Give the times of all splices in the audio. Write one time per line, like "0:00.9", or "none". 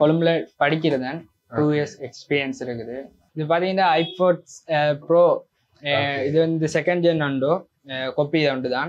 0:03.2

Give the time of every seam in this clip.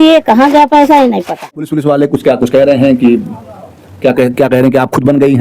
0:01.7

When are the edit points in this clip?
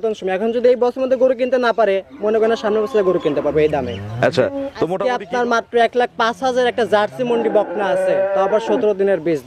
0:04.9

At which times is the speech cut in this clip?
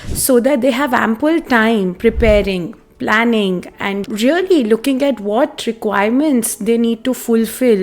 0:04.0

